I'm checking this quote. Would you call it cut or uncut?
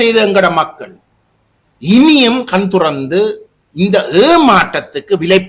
uncut